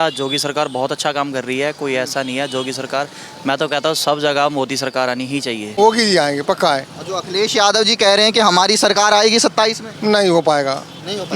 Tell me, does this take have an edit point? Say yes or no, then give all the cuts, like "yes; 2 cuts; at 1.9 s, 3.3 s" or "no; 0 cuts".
yes; 1 cut; at 5.7 s